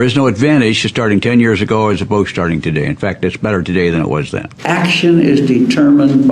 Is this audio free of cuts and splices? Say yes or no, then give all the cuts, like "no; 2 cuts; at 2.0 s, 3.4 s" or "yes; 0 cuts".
no; 1 cut; at 4.5 s